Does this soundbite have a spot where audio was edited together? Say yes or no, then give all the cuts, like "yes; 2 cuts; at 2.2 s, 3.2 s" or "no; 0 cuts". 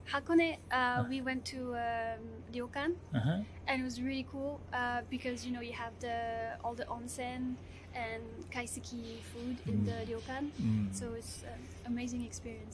no; 0 cuts